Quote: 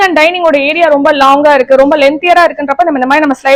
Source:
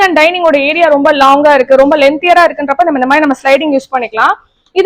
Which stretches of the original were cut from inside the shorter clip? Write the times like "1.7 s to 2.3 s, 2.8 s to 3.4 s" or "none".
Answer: none